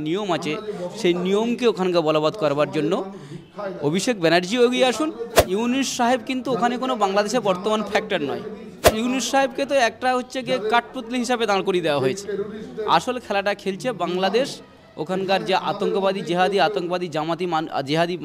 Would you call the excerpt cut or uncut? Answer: cut